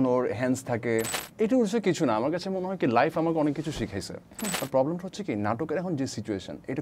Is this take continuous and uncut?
no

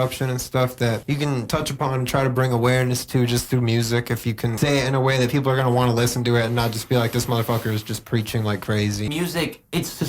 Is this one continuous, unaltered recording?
no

